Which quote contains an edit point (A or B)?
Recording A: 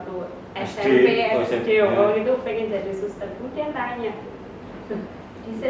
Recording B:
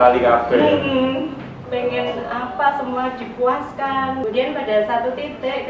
B